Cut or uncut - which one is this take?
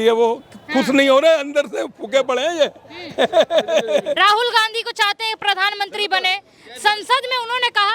cut